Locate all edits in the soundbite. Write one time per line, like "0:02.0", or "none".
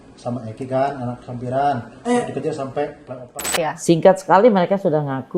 0:03.5